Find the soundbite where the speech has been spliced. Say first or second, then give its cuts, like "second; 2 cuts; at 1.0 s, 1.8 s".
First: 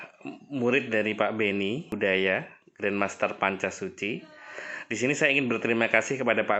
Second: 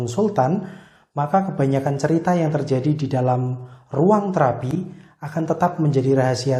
first; 1 cut; at 1.9 s